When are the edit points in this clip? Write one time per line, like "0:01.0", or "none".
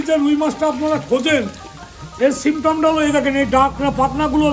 0:01.8